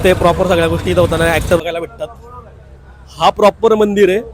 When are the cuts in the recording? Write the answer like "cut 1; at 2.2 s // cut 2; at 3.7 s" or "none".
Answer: cut 1; at 1.6 s